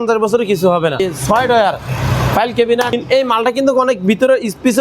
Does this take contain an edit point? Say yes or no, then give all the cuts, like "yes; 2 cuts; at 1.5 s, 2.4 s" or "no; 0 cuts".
yes; 2 cuts; at 1.0 s, 2.9 s